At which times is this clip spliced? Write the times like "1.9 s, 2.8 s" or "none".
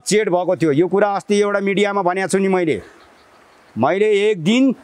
none